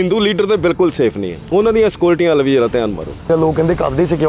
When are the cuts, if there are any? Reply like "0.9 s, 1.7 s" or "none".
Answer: 1.3 s, 3.3 s

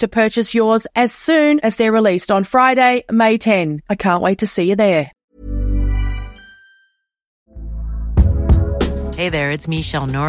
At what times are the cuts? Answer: 5.3 s, 7.3 s

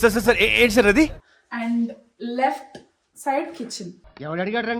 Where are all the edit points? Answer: 1.2 s

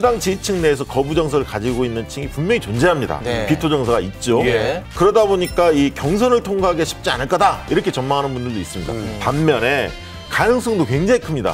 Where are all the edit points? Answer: none

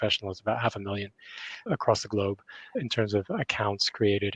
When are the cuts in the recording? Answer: 2.8 s

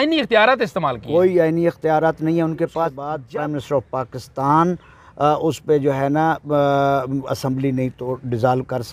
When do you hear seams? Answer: 3.1 s

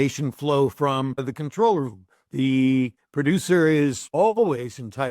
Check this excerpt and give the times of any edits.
1.3 s, 3.0 s, 4.0 s

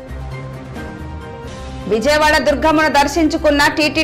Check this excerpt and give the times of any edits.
none

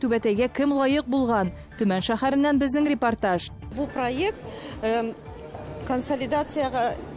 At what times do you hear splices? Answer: none

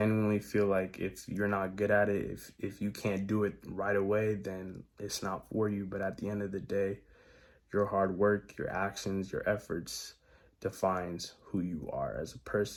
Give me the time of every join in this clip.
none

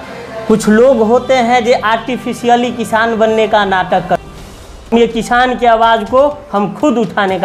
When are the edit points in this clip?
4.9 s

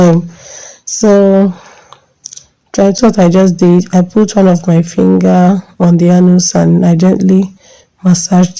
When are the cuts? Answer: 3.0 s

